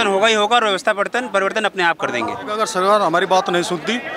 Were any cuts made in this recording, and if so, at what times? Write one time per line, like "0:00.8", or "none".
0:02.6